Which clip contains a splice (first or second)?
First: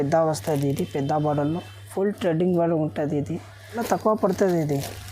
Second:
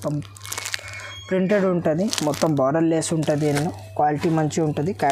first